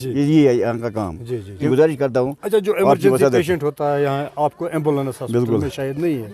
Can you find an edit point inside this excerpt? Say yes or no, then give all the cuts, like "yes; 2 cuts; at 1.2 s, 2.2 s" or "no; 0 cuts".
yes; 1 cut; at 1.7 s